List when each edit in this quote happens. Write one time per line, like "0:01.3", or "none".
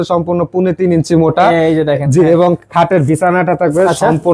none